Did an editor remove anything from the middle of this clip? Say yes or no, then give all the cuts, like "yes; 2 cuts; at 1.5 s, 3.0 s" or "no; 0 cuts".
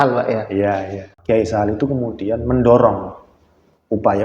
yes; 1 cut; at 1.1 s